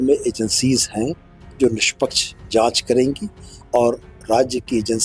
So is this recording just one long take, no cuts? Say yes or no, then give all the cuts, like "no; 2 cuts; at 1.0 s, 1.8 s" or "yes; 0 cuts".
yes; 0 cuts